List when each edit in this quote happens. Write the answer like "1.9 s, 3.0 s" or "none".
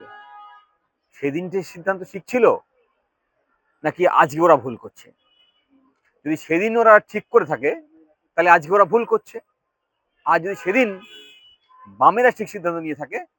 none